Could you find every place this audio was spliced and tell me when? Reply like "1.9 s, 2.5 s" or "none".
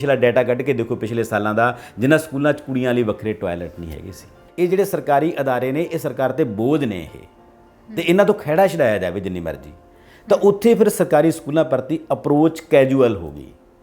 4.4 s